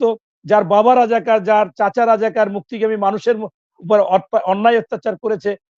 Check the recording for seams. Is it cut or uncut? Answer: uncut